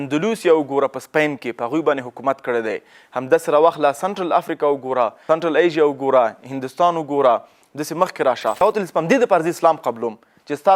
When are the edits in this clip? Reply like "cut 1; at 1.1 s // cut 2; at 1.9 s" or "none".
cut 1; at 5.2 s // cut 2; at 8.6 s